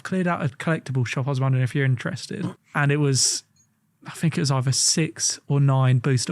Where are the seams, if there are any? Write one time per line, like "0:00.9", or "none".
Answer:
0:02.6